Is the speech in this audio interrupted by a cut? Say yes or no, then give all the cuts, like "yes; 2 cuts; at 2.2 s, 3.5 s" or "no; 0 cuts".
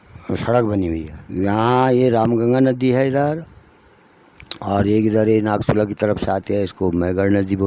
yes; 1 cut; at 1.2 s